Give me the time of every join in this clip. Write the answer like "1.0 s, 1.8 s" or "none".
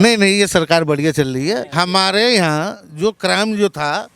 1.7 s